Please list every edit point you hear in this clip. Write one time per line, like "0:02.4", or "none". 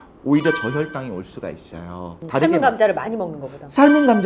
0:02.2